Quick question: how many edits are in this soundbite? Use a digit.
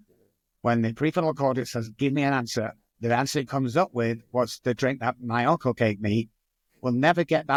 0